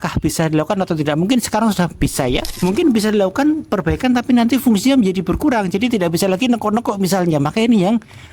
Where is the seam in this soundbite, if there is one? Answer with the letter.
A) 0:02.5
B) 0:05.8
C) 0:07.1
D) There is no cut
A